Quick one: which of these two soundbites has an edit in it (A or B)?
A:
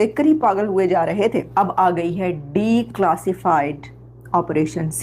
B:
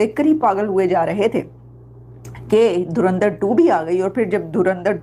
A